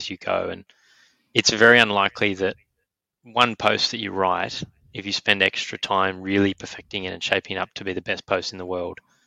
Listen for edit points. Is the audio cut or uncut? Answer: uncut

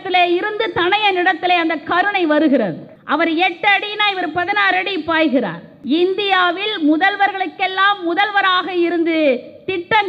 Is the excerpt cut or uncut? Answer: cut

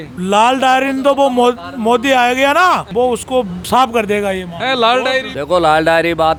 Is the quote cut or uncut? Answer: uncut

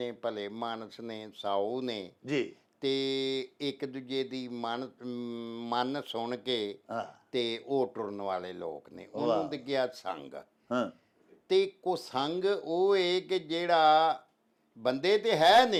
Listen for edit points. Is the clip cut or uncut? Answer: uncut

